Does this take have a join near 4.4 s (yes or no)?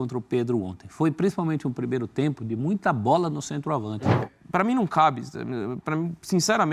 yes